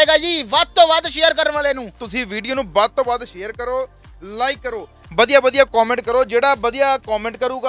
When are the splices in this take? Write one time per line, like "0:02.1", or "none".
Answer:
0:02.0